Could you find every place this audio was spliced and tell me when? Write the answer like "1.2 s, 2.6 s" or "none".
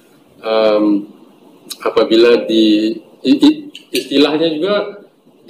none

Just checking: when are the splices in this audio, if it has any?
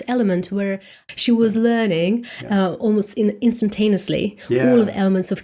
1.0 s

